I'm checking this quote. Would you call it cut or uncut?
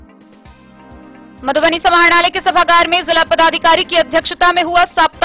uncut